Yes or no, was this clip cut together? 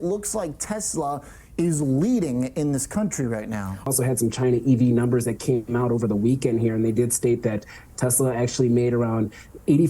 yes